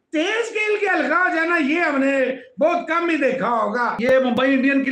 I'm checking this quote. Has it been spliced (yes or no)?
yes